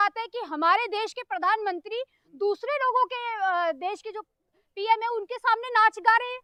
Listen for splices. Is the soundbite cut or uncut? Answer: uncut